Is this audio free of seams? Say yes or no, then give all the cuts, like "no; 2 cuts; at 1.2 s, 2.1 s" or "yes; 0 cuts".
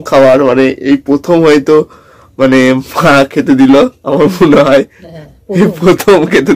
yes; 0 cuts